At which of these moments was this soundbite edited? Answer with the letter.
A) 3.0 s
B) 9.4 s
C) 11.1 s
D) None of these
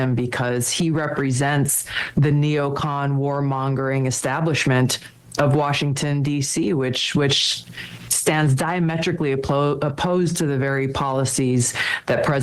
D